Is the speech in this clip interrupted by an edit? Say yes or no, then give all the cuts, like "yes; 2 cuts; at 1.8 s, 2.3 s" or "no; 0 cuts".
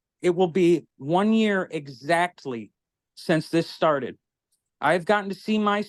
no; 0 cuts